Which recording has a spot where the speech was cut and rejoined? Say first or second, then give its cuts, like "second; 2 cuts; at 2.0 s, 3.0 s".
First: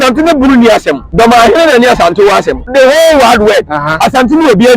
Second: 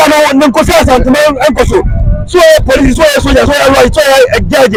first; 2 cuts; at 1.0 s, 2.6 s